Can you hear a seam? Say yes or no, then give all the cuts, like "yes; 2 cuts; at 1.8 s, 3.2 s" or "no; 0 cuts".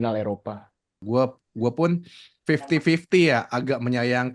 yes; 1 cut; at 1.0 s